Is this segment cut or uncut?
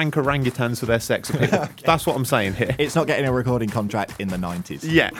uncut